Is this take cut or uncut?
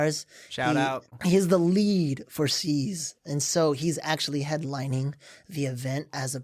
cut